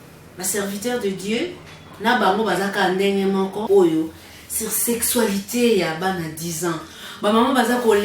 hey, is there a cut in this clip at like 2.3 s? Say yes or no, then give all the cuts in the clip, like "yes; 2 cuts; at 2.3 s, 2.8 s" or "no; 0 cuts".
no; 1 cut; at 3.6 s